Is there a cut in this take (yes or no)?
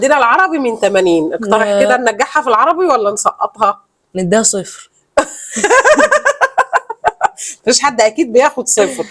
no